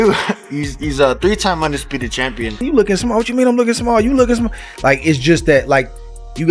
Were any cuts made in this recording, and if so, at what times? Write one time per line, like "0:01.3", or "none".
0:02.6